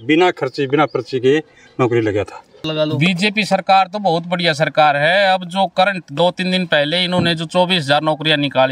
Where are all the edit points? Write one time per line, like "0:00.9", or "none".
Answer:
0:02.6

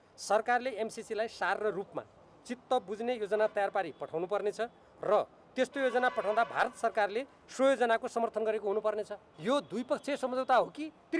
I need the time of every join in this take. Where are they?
0:09.2

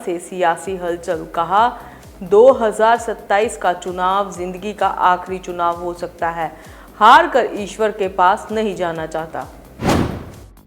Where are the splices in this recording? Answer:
0:09.6

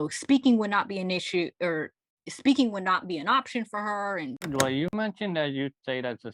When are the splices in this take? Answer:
0:04.4

